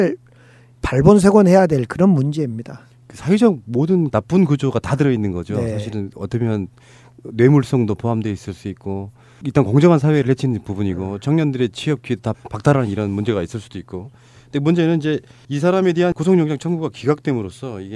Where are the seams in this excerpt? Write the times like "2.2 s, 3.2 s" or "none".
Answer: 10.8 s